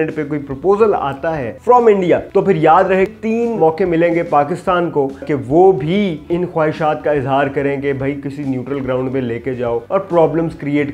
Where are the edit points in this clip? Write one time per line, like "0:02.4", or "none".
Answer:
0:03.1
0:09.8